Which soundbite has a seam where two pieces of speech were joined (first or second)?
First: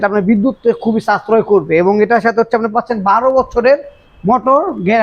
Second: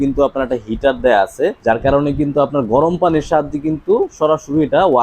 second